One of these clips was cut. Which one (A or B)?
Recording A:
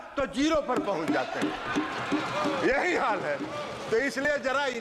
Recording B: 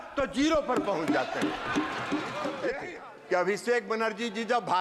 B